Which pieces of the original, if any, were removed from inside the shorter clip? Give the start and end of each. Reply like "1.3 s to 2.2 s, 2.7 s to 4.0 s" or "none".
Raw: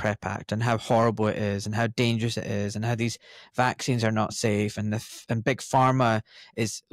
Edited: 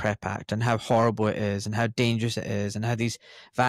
none